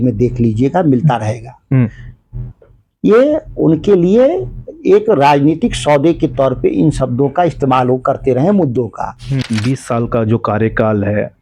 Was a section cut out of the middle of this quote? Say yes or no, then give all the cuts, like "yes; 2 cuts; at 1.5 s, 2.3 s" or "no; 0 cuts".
yes; 1 cut; at 9.4 s